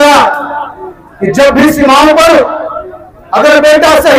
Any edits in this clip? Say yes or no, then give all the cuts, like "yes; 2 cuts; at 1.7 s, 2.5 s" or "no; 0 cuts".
no; 0 cuts